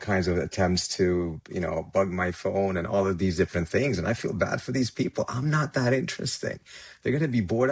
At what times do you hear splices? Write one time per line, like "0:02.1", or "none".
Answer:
none